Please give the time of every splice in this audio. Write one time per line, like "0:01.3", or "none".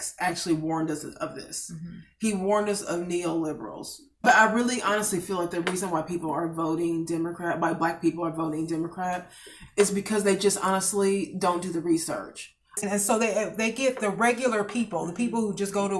0:04.2
0:12.8

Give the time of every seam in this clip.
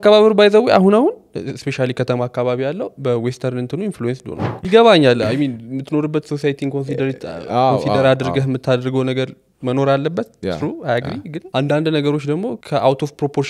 0:04.5
0:11.3
0:12.6

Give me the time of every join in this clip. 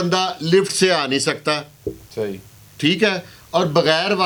none

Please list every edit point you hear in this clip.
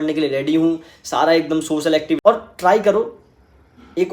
0:02.2

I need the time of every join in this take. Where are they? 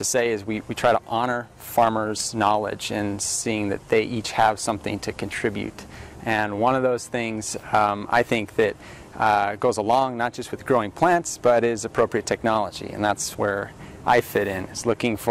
none

